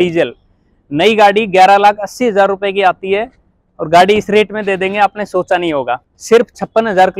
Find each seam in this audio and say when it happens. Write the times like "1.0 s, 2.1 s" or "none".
6.1 s